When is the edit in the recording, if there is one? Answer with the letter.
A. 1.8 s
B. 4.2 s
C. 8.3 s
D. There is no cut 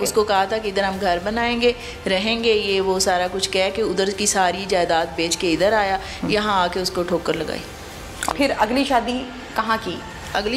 C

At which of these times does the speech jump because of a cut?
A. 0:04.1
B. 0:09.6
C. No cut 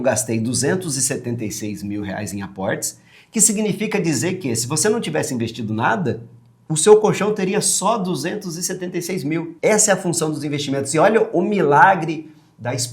B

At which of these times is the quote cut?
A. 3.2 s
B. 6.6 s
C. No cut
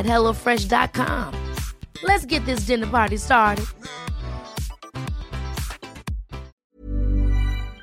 B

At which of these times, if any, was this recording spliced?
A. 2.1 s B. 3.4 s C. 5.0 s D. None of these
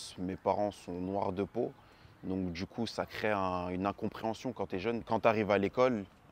C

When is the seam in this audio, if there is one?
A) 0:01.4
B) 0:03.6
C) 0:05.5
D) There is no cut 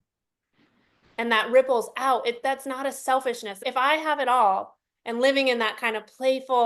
B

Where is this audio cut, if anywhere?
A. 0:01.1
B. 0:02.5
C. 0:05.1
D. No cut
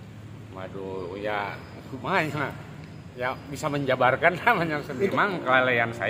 C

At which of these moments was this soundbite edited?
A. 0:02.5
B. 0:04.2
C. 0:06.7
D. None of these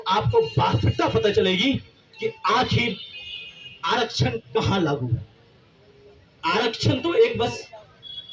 D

